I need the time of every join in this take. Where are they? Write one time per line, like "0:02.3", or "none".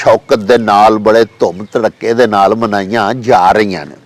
none